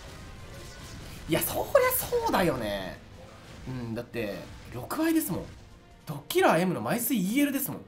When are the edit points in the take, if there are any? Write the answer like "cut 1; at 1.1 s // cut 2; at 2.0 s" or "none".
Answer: none